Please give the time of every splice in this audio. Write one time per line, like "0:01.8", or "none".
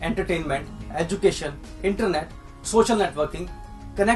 none